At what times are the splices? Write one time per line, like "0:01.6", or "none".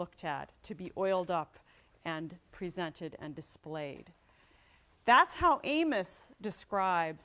none